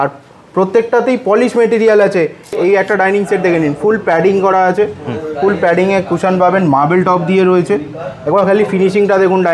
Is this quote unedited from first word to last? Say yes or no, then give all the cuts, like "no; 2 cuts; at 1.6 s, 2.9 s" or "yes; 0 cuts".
no; 1 cut; at 2.5 s